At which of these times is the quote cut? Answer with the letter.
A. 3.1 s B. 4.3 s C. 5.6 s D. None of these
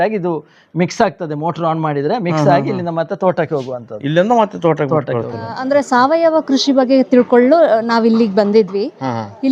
C